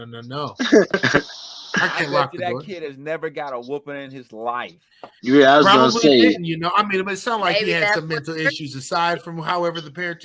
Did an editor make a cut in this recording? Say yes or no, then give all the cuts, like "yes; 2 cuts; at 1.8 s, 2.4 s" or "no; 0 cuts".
yes; 1 cut; at 1.0 s